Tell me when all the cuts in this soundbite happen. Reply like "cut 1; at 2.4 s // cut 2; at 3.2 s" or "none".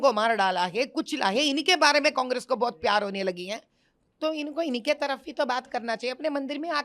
none